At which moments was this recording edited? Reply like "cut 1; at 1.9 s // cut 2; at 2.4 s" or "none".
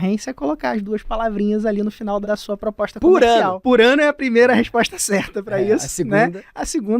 cut 1; at 2.2 s // cut 2; at 3.6 s